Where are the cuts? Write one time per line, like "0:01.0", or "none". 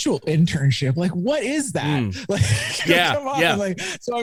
none